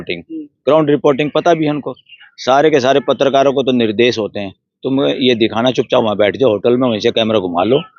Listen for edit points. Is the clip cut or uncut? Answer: uncut